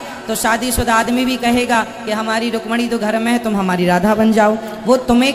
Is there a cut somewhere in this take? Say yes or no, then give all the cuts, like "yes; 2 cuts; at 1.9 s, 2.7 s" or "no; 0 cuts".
no; 0 cuts